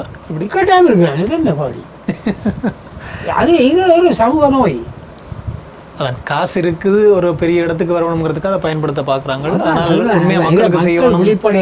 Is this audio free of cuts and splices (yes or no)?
yes